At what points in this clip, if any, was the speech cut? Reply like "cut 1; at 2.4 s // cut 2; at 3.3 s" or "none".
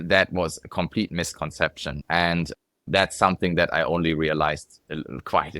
cut 1; at 1.9 s